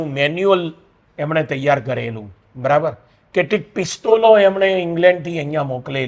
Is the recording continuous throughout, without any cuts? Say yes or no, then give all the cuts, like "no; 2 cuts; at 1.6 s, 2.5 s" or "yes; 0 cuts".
yes; 0 cuts